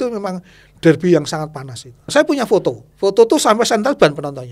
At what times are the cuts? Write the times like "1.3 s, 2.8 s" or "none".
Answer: 2.1 s, 2.9 s